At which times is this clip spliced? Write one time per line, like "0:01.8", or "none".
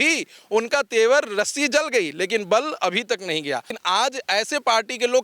0:03.8